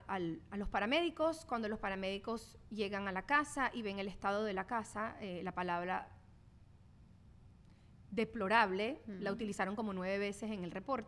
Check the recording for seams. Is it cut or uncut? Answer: uncut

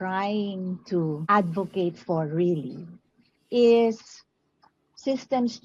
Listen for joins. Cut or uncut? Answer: cut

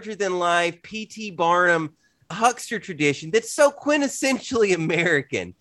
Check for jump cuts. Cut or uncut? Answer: cut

